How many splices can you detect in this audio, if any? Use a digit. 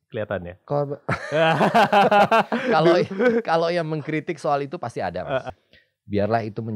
1